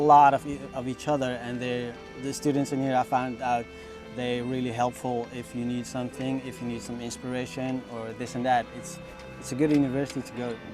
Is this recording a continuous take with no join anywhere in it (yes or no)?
yes